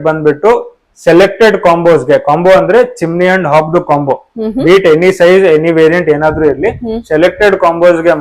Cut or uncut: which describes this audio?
uncut